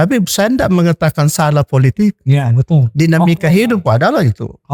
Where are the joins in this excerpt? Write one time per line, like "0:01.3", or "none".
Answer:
none

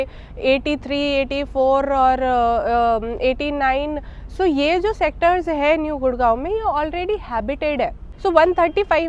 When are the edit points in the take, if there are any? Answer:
0:08.0

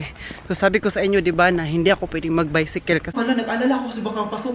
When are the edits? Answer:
0:03.1

